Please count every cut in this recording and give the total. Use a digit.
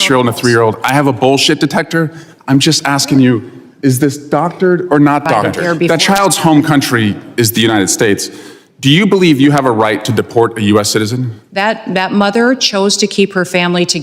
1